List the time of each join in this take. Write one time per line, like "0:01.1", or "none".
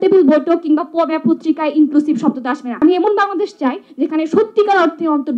0:02.7